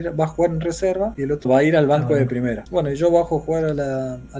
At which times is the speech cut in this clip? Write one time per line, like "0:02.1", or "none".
0:01.5
0:02.6